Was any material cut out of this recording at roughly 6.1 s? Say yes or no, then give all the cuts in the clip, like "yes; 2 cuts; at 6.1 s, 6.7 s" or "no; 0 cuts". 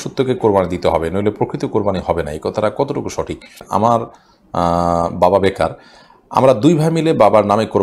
no; 1 cut; at 3.6 s